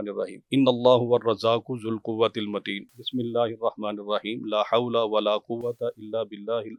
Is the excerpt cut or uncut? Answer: uncut